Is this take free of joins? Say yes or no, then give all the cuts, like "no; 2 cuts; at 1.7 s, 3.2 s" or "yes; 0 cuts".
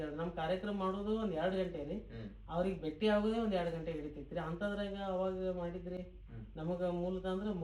yes; 0 cuts